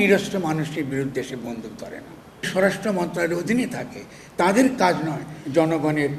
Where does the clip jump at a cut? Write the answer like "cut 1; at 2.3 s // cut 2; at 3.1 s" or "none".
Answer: cut 1; at 2.5 s